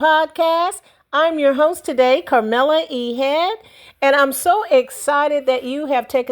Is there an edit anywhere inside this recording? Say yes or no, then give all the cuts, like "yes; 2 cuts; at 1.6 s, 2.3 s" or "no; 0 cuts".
no; 0 cuts